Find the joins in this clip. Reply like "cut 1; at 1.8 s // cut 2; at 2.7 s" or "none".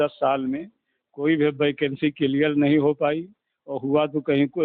none